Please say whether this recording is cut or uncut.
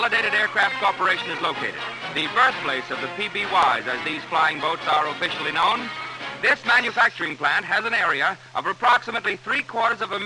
uncut